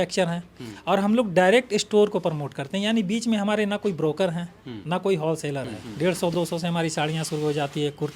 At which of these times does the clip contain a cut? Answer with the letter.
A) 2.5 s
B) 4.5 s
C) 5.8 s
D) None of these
C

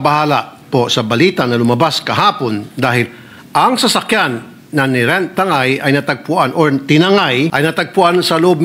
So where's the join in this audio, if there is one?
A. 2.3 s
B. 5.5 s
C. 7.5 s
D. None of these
C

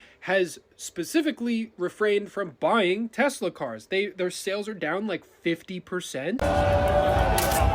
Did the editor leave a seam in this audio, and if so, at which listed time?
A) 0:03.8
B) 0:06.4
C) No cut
B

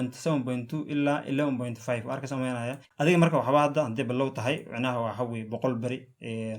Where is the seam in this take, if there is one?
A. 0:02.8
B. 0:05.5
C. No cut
A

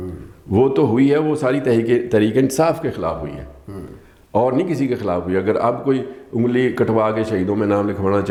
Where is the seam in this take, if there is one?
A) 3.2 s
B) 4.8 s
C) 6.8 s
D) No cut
D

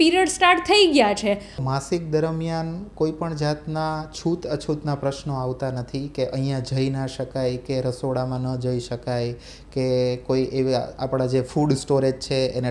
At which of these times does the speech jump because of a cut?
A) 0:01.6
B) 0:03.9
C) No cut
A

